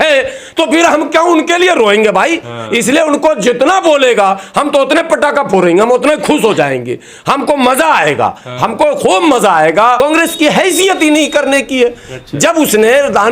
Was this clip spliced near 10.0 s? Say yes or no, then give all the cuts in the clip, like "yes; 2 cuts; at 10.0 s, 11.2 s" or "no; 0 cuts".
yes; 1 cut; at 10.0 s